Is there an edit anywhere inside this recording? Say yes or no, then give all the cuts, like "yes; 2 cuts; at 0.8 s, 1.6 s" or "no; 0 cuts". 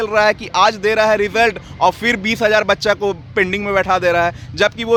no; 0 cuts